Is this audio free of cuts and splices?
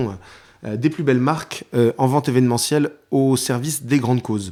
yes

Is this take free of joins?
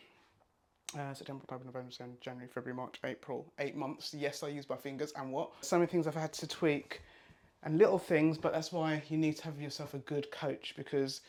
yes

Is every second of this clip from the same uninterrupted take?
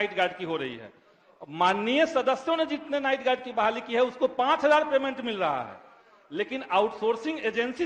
yes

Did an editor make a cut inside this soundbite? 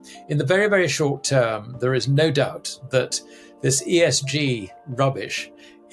no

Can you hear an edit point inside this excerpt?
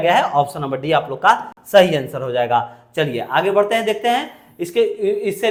no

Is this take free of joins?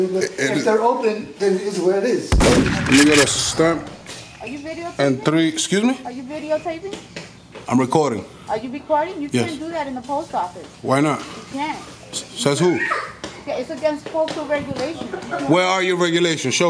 no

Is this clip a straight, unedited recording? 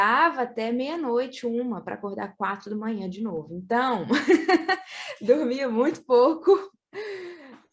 yes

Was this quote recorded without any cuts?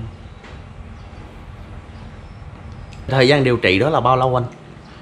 no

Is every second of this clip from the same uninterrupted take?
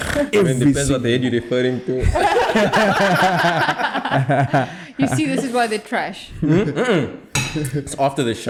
yes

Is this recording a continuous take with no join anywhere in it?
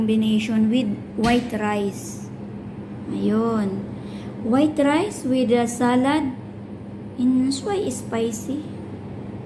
yes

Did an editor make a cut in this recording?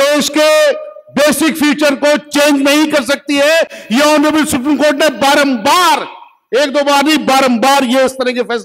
no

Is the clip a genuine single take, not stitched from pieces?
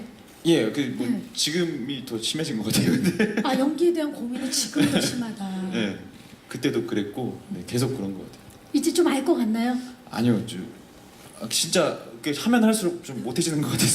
no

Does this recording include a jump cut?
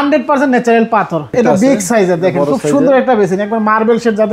yes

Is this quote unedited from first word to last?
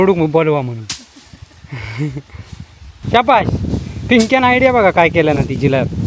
no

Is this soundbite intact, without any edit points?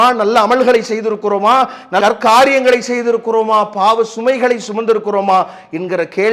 yes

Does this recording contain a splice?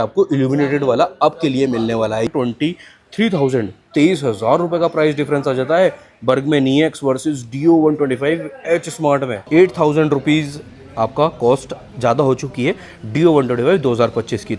yes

